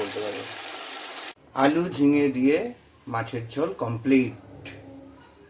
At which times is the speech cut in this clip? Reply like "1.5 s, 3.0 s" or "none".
1.2 s